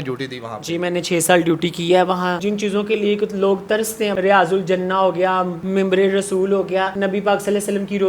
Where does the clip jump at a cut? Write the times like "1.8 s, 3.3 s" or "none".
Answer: 2.4 s, 4.1 s, 6.9 s